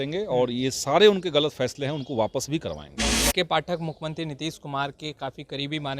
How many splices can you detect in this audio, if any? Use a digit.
1